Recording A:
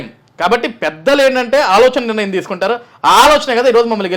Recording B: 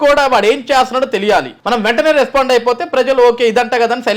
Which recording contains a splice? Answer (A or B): B